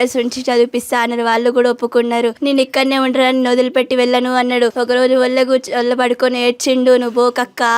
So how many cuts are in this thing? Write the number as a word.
two